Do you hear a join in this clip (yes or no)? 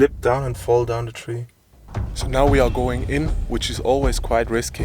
no